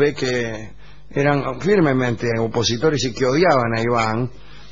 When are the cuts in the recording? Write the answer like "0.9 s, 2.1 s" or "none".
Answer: 3.0 s